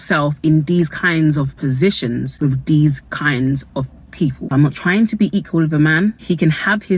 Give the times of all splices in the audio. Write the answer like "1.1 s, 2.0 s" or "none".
1.5 s, 4.4 s